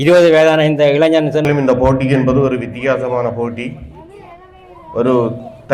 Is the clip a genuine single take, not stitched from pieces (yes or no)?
no